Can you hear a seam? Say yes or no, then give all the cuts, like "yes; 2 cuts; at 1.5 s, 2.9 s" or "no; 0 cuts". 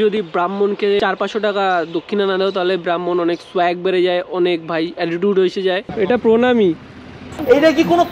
yes; 2 cuts; at 1.0 s, 5.9 s